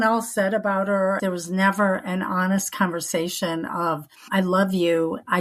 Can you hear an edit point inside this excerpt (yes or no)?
yes